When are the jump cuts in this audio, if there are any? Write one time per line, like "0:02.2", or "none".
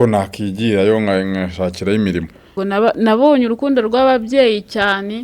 0:02.5